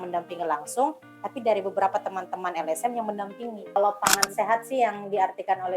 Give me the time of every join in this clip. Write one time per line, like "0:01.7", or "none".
0:03.8